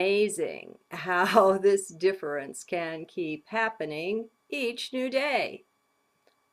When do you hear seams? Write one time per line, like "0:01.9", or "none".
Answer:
0:04.4